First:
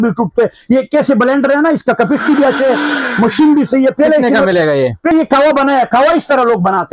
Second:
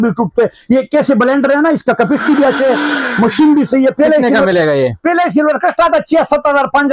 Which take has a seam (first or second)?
first